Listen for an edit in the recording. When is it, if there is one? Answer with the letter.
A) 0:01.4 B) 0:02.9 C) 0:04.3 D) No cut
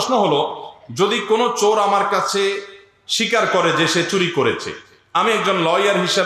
D